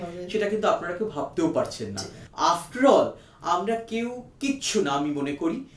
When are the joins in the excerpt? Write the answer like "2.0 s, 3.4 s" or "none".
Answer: 2.2 s